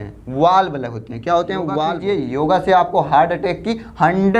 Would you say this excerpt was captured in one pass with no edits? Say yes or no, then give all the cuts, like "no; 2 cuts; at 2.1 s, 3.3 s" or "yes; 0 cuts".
no; 1 cut; at 2.0 s